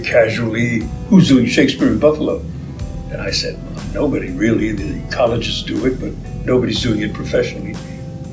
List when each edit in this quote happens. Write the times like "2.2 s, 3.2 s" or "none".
0.9 s